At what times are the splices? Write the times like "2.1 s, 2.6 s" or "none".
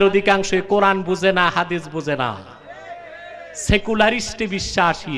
none